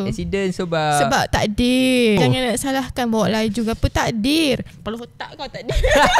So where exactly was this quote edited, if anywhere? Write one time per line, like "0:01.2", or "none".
0:02.2